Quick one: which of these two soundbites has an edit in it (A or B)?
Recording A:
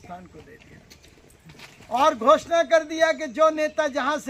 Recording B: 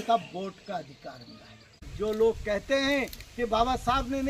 B